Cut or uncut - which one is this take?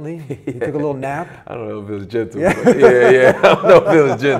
uncut